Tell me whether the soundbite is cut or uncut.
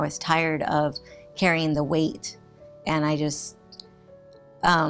uncut